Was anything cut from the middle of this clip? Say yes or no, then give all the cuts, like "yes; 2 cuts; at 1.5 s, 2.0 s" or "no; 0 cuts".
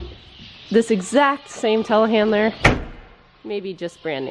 no; 0 cuts